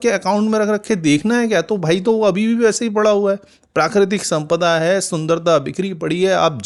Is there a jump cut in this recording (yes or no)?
no